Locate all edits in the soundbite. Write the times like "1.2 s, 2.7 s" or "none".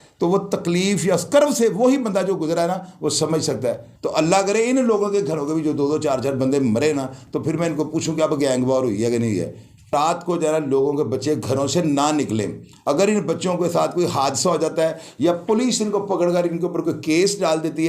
3.9 s, 9.9 s